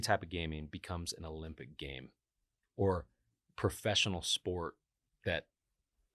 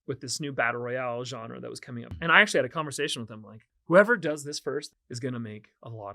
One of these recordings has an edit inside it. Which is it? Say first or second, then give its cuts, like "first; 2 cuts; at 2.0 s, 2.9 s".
second; 3 cuts; at 2.1 s, 3.7 s, 4.9 s